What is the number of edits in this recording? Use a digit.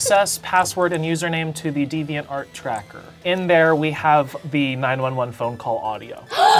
1